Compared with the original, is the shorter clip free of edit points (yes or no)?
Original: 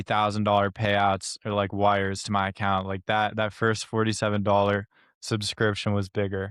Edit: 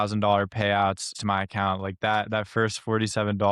no